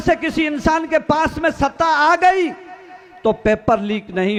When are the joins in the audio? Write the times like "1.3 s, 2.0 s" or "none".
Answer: none